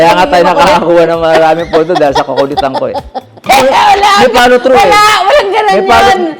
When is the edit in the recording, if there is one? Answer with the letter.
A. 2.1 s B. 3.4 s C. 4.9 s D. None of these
B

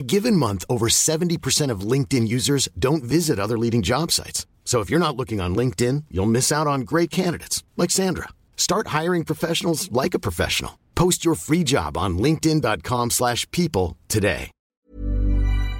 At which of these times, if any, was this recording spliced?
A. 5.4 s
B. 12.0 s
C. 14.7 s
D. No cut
C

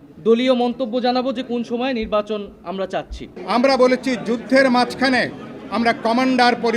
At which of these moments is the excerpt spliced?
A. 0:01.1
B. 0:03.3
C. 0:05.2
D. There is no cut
B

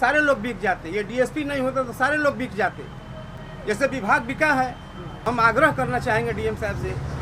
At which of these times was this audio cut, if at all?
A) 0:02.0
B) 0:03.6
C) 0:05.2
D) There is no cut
C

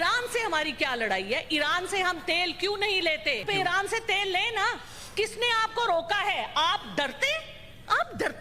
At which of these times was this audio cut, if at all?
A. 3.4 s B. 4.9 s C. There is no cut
A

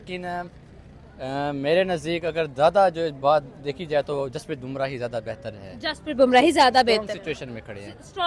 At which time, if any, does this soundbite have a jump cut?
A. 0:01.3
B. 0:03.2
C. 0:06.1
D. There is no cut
D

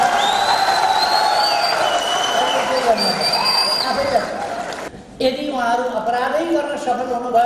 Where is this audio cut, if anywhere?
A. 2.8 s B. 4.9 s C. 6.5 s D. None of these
B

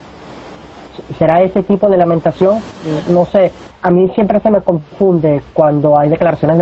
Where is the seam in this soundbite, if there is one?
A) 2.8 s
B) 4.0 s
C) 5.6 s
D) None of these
D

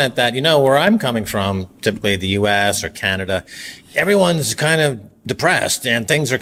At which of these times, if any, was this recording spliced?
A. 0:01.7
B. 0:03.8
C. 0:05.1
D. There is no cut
D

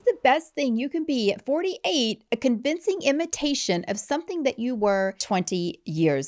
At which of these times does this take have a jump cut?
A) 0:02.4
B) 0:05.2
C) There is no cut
B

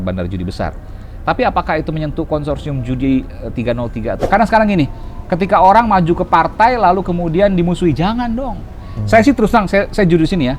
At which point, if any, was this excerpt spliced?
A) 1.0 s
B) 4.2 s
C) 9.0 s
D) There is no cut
B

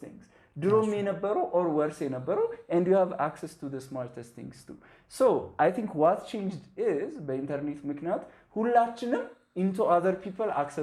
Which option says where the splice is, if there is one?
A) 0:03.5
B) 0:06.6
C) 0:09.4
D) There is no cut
D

